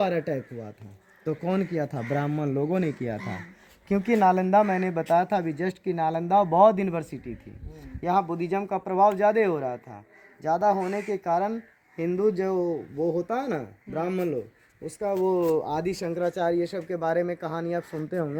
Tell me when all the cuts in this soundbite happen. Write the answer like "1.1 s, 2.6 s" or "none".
none